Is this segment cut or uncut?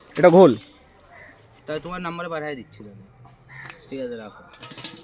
uncut